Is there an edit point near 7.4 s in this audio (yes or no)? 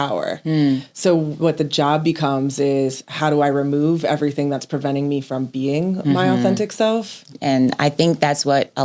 yes